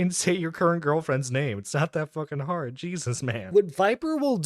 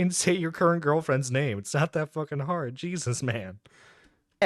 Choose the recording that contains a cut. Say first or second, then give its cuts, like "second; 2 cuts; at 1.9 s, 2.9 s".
first; 1 cut; at 3.4 s